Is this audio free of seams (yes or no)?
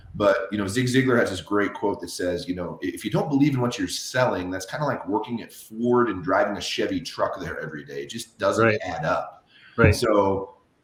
yes